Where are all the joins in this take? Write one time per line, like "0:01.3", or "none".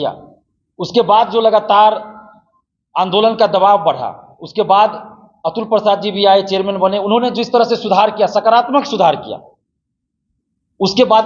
none